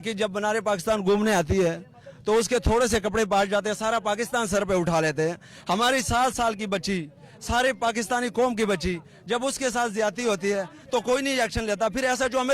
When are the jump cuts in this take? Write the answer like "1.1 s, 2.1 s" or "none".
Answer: none